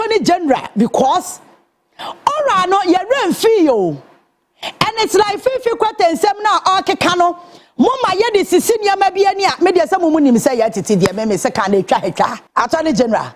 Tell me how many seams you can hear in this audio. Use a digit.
1